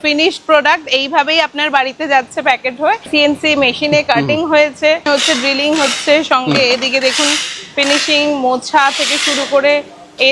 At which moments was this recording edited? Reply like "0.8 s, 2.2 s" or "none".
3.1 s, 5.0 s